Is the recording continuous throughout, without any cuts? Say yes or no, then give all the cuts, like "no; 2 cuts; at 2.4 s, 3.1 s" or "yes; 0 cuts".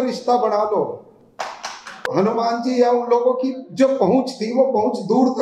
no; 1 cut; at 2.1 s